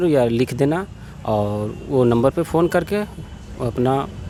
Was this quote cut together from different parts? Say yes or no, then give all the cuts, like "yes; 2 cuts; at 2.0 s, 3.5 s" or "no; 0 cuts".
no; 0 cuts